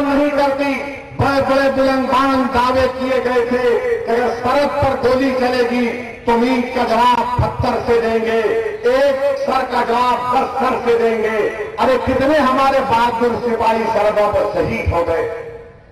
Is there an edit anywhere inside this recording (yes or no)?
yes